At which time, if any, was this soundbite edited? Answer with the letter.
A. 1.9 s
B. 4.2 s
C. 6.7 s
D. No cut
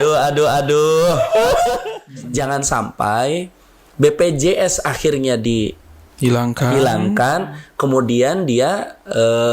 A